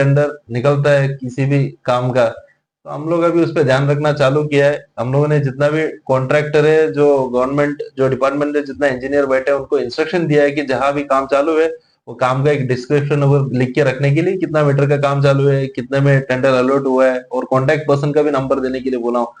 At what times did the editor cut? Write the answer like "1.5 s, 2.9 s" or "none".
none